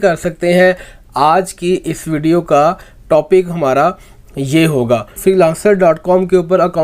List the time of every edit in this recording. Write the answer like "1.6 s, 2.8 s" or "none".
5.2 s